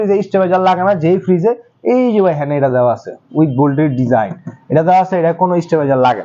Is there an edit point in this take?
no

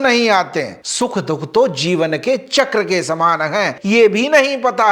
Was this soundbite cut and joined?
yes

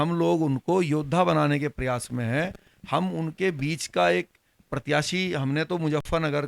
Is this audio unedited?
yes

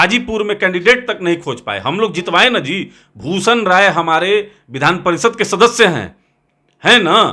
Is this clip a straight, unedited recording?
yes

